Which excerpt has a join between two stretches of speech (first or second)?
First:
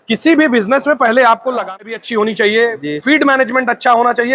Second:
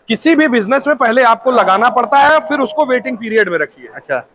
first